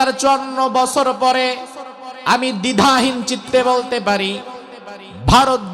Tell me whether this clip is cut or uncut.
uncut